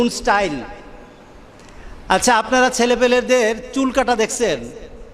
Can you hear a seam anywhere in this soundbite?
no; 0 cuts

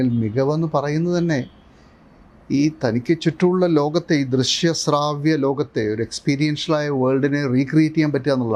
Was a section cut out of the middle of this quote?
no; 0 cuts

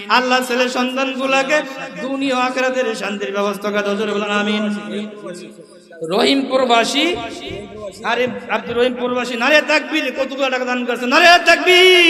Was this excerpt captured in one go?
yes; 0 cuts

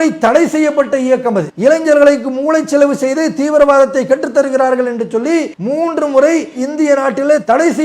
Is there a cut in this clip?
yes; 2 cuts; at 1.5 s, 5.6 s

